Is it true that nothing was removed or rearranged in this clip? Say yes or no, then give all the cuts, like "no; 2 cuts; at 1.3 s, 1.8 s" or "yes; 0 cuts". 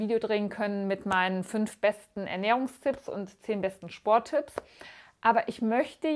yes; 0 cuts